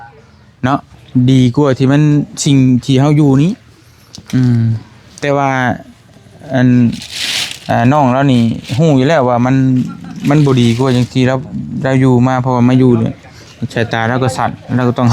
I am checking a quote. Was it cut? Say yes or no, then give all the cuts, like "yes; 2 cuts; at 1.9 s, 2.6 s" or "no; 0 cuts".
no; 0 cuts